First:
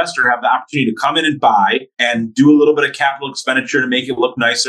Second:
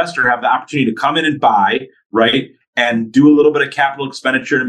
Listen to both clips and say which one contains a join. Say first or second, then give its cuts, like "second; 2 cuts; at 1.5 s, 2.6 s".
first; 1 cut; at 1.9 s